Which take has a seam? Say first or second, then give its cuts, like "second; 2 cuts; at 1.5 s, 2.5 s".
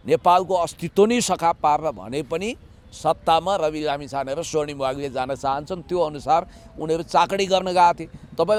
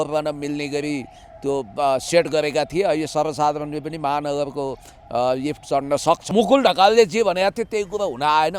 second; 1 cut; at 6.2 s